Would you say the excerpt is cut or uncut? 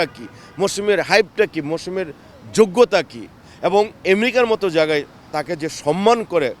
uncut